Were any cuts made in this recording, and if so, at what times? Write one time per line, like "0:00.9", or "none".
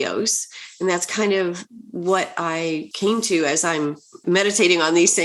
0:02.9
0:04.1